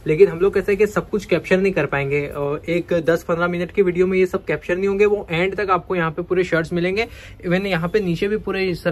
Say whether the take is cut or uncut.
uncut